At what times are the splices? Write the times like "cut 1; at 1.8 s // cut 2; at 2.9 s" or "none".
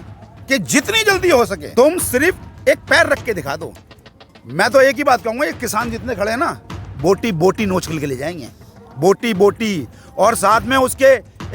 cut 1; at 1.6 s